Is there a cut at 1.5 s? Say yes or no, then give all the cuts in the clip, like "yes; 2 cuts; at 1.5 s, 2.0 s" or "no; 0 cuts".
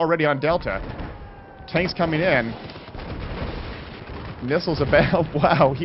yes; 1 cut; at 1.5 s